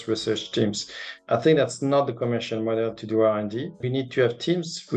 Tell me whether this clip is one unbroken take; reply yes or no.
no